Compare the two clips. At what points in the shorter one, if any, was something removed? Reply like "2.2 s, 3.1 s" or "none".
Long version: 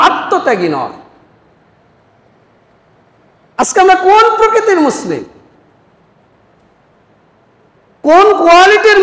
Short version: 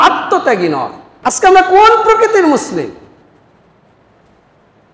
1.0 s